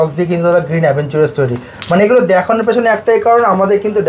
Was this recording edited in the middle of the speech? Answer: no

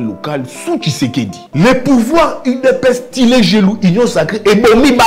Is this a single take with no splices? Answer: no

